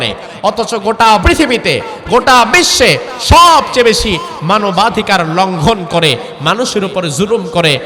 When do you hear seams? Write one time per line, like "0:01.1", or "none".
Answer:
0:01.2